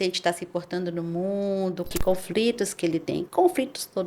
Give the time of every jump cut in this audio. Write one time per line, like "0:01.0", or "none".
0:02.0
0:03.3